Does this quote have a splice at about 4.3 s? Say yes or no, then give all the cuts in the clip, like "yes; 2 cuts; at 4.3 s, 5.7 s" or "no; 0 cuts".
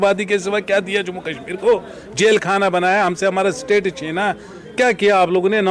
no; 0 cuts